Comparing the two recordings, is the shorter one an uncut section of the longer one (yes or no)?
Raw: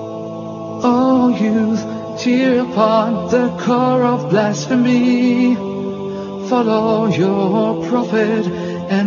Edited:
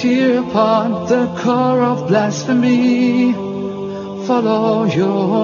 yes